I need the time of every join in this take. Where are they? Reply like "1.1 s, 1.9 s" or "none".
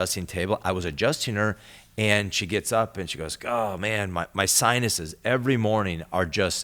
none

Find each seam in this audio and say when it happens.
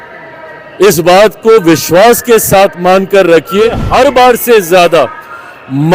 3.8 s

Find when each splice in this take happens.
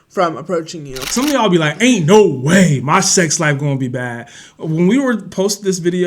1.1 s

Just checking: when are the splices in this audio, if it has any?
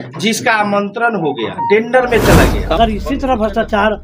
2.6 s

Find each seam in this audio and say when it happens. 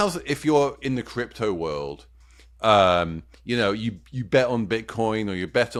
none

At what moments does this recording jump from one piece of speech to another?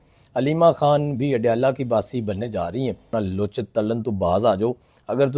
3.1 s

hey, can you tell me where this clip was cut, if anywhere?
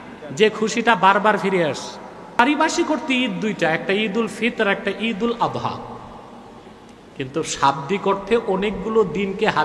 2.4 s

